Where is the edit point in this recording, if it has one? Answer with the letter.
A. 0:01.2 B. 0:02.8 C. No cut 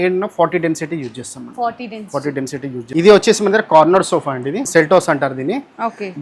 B